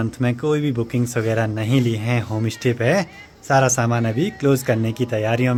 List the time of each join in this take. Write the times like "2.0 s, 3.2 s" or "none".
none

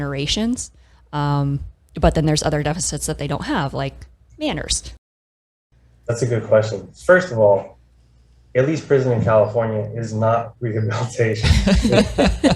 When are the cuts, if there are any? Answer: 5.4 s

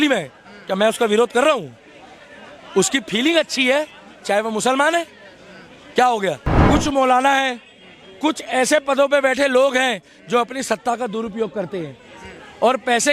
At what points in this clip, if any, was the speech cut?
6.5 s

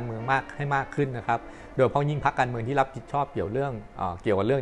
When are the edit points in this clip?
none

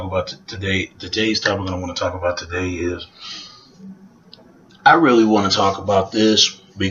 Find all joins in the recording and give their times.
4.9 s

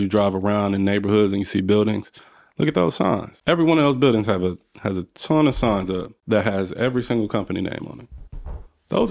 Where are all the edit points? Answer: 3.3 s, 6.1 s

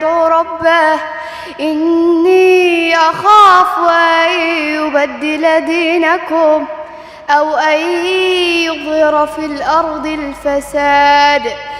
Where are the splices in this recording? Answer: none

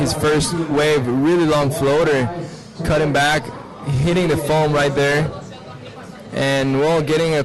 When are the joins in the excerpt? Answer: none

